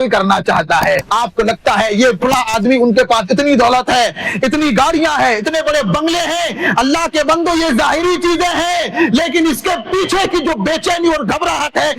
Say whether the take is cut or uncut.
cut